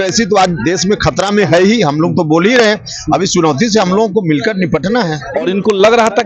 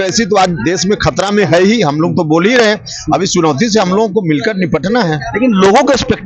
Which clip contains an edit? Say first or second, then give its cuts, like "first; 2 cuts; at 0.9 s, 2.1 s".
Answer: first; 1 cut; at 5.2 s